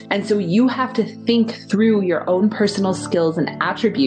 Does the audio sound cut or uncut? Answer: uncut